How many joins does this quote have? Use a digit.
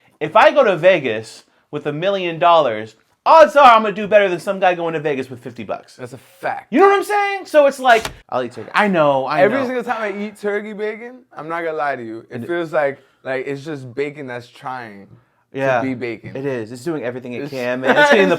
1